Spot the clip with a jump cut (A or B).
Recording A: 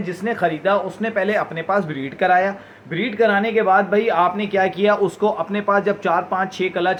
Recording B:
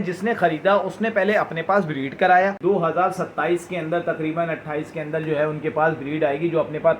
B